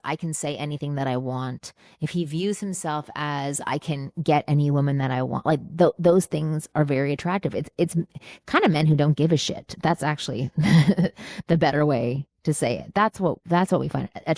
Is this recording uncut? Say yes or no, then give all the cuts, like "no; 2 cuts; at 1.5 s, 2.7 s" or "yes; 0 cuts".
yes; 0 cuts